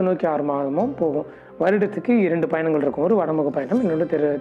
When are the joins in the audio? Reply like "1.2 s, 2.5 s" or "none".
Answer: none